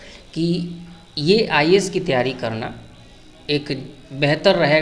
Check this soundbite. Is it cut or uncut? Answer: uncut